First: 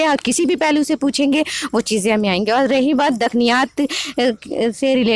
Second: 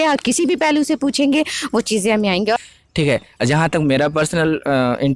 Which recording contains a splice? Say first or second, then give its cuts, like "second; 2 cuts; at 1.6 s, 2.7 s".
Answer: second; 1 cut; at 2.6 s